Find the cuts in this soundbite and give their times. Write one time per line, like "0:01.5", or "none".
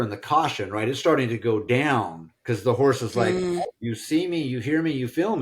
0:03.7